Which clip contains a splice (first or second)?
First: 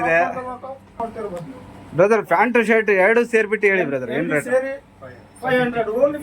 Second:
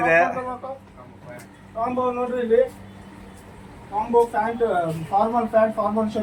first